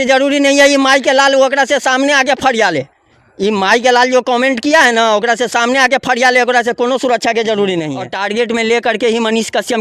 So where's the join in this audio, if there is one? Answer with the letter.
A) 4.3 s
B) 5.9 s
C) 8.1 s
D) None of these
C